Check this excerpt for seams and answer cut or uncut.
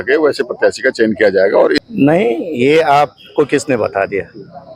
cut